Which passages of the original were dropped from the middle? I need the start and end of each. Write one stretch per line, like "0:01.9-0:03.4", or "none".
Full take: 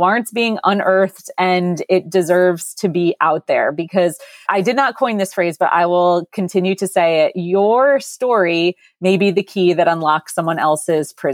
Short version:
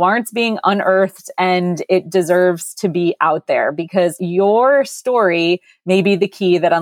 0:04.2-0:07.4